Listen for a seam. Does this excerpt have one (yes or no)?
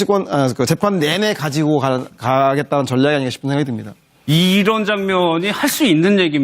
yes